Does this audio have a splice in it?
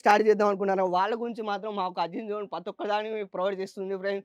no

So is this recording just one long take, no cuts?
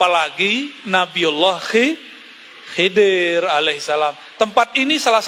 yes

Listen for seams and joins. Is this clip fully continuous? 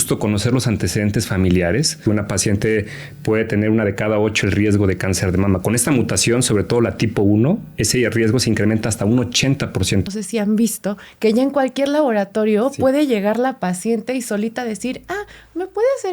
no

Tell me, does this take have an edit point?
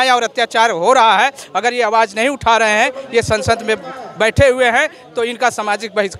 no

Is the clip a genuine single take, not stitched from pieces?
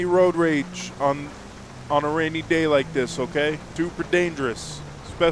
yes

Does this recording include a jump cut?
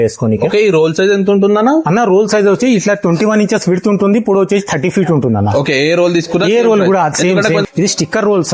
yes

